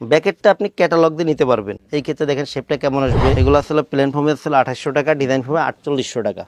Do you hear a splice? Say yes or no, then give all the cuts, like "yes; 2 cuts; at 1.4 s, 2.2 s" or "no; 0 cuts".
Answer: yes; 2 cuts; at 1.8 s, 3.4 s